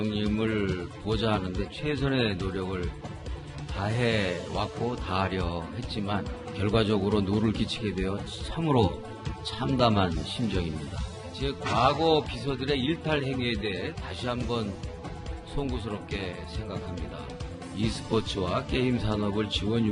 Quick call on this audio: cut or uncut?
uncut